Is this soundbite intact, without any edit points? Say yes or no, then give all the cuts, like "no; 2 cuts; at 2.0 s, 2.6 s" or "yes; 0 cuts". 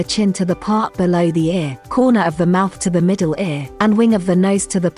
no; 2 cuts; at 1.8 s, 3.6 s